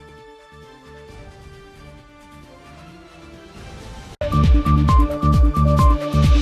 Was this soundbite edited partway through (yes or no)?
yes